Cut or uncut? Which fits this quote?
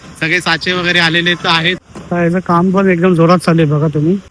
cut